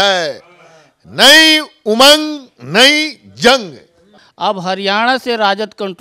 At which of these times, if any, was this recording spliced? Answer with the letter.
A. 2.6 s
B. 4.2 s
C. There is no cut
B